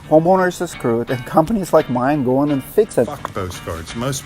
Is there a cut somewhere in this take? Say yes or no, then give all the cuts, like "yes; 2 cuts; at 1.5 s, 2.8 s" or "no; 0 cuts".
yes; 1 cut; at 3.1 s